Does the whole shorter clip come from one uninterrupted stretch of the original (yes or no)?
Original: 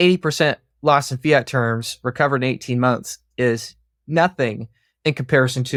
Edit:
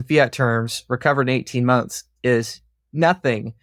yes